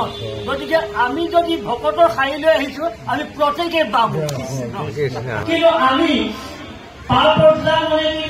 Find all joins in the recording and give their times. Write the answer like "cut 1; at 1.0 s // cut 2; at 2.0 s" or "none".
cut 1; at 5.4 s